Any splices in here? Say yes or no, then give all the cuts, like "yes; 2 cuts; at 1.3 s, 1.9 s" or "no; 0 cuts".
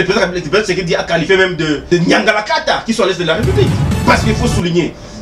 yes; 1 cut; at 3.8 s